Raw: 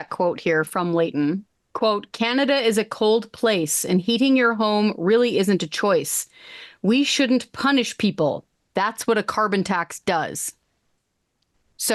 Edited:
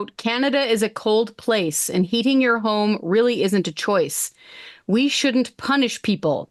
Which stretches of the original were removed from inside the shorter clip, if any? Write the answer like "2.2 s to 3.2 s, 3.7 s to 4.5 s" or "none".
none